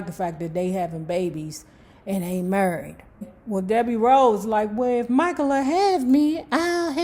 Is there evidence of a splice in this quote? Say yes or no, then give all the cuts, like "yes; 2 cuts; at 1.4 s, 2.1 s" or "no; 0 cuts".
yes; 1 cut; at 3.3 s